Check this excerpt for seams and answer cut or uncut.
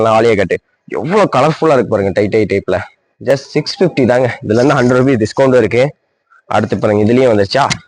uncut